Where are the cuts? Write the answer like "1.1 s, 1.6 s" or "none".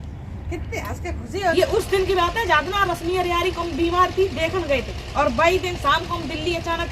1.5 s